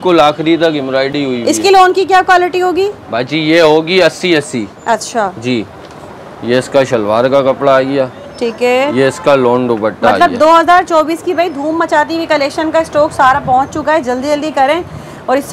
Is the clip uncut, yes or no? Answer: yes